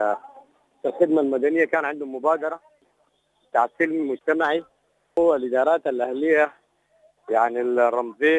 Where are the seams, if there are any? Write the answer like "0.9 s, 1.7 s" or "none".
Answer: 5.2 s